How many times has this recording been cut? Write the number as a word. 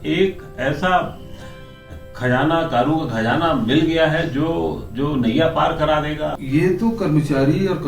one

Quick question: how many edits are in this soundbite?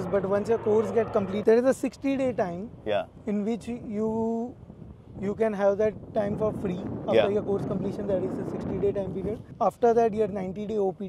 zero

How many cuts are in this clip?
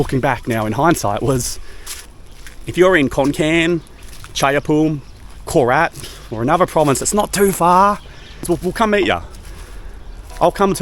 two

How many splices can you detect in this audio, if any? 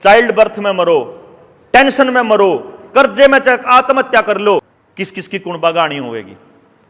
one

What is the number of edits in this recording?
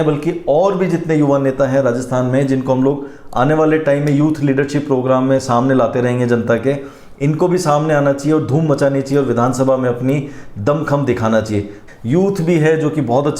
one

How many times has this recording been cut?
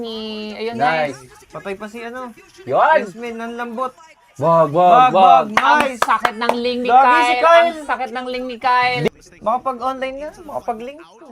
one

